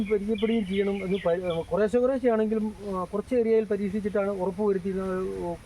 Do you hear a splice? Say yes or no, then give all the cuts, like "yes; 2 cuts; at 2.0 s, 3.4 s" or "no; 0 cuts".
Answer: no; 0 cuts